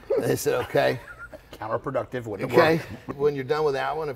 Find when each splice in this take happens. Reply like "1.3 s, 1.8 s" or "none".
3.1 s